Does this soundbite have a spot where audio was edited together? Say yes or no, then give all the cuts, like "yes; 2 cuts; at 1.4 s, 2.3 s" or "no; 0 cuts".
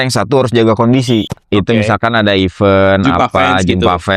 yes; 1 cut; at 1.4 s